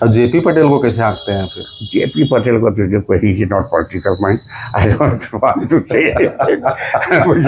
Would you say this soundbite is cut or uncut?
uncut